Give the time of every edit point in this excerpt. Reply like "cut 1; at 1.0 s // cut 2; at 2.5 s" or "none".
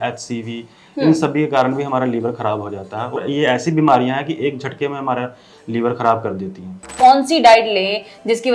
cut 1; at 3.2 s // cut 2; at 6.9 s

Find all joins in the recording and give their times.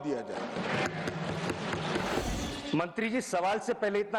cut 1; at 2.2 s

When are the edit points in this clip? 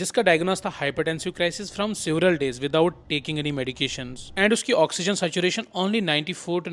none

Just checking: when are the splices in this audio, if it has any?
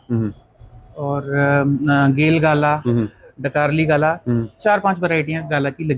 none

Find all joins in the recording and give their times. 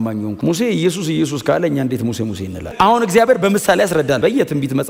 none

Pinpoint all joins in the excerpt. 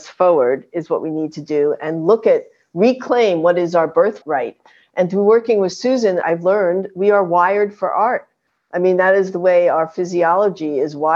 cut 1; at 4.2 s // cut 2; at 6.2 s

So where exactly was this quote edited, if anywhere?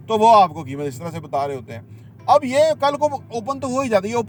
none

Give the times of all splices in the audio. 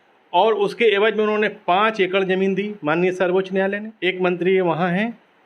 cut 1; at 3.9 s

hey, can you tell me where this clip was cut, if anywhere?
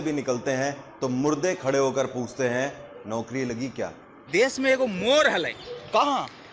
cut 1; at 4.2 s

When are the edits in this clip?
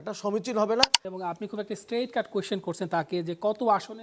cut 1; at 1.1 s

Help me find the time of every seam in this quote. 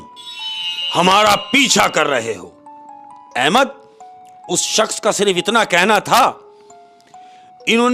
none

